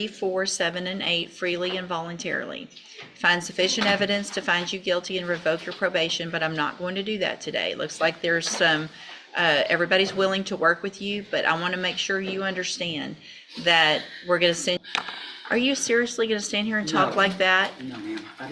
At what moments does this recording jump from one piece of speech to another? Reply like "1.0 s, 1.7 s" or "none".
14.8 s